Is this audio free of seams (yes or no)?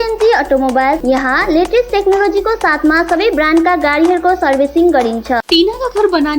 no